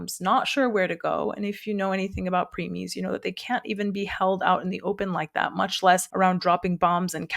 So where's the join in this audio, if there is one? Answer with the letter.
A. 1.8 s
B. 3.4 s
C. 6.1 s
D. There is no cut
C